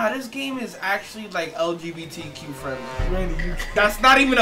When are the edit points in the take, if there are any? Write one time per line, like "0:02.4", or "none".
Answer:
none